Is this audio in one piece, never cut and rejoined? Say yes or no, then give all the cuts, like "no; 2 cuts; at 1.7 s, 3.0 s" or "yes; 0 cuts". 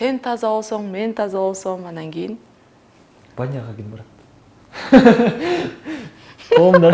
yes; 0 cuts